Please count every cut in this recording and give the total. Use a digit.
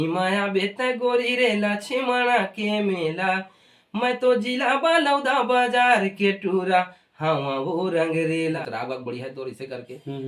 1